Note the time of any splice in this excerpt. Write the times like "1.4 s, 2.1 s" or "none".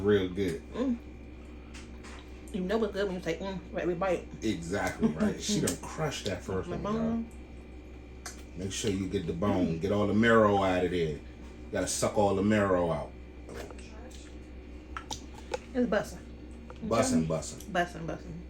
13.5 s